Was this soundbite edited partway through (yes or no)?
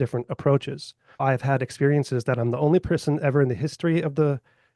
yes